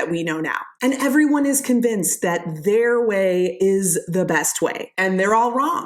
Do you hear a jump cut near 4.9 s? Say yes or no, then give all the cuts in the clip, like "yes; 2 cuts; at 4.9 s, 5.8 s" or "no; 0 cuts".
yes; 1 cut; at 4.9 s